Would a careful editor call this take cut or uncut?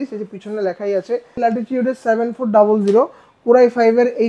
cut